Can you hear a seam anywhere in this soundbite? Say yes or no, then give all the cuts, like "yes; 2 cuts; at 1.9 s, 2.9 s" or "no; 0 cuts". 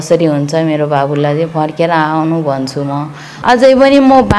yes; 1 cut; at 3.3 s